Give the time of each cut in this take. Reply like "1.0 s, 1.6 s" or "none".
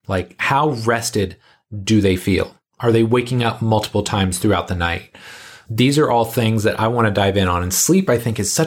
none